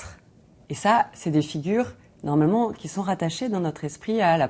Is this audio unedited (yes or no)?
yes